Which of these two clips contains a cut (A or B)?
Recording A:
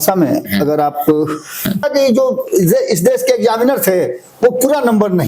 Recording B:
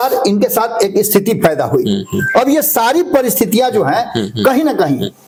A